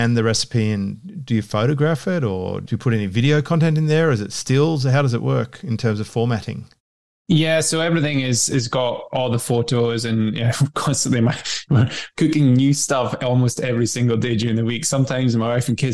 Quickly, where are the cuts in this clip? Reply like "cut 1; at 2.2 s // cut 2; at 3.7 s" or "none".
none